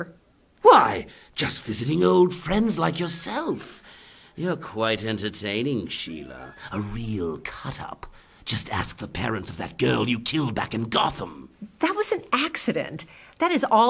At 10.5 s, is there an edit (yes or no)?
no